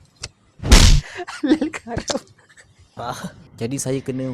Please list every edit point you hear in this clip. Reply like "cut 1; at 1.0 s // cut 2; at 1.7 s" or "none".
cut 1; at 3.2 s